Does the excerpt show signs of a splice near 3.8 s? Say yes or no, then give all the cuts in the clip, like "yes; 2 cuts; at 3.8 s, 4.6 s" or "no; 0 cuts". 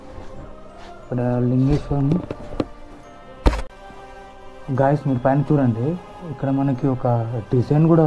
yes; 1 cut; at 3.8 s